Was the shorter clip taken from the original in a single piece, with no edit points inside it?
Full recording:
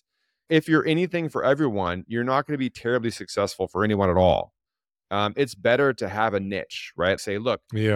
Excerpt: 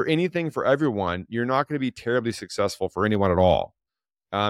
yes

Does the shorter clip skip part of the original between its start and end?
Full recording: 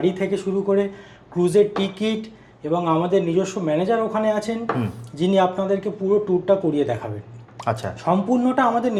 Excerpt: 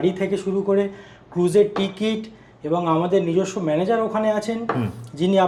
no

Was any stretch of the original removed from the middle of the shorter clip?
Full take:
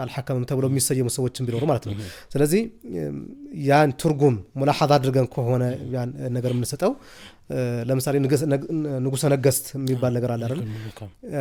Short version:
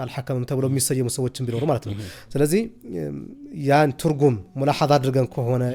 no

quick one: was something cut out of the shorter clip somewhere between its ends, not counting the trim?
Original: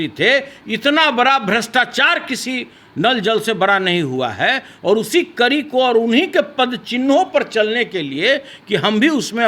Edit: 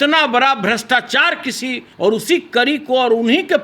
yes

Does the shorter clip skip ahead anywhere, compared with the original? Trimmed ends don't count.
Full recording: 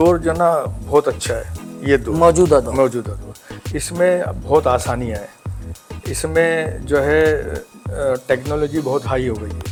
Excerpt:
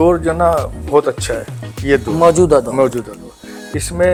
no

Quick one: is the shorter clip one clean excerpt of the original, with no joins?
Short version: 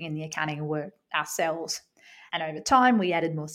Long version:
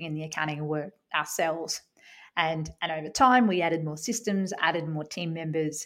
no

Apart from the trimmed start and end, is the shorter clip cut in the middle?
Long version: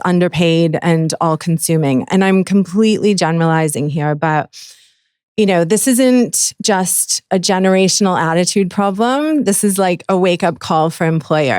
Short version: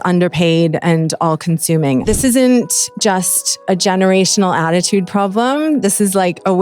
yes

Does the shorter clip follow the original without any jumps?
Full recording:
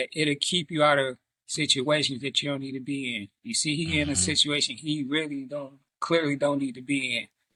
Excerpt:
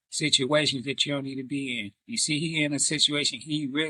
yes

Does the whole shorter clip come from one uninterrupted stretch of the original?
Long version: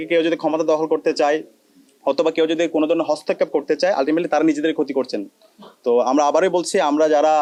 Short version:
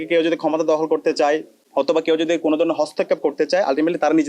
no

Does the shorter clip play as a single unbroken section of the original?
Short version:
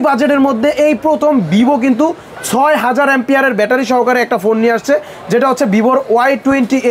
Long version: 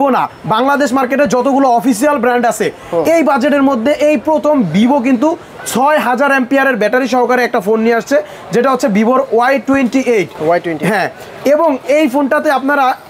yes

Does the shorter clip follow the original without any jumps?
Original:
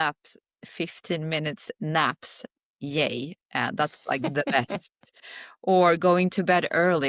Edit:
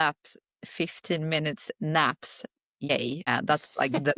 no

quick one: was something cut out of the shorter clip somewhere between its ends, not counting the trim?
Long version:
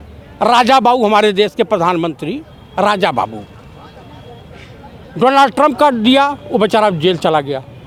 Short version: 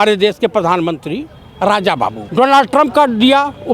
yes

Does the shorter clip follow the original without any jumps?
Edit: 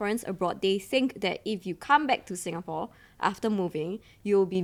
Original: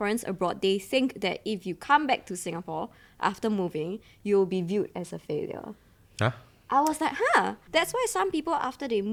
yes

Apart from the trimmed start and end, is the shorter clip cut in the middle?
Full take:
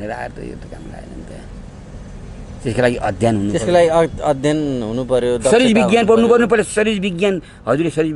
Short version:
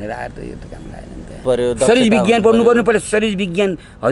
yes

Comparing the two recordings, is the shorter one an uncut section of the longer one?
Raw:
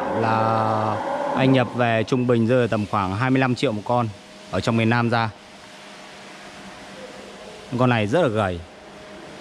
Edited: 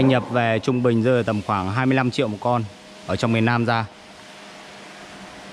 yes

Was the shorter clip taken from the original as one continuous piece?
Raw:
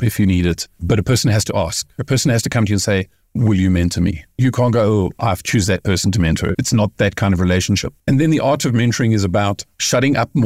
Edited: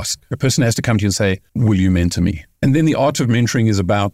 no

